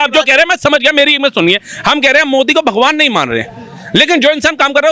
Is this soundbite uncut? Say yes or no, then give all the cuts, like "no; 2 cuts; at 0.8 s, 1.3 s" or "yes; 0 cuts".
yes; 0 cuts